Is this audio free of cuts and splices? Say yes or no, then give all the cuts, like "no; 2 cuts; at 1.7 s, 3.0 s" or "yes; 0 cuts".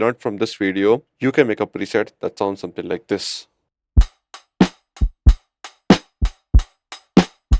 no; 1 cut; at 1.1 s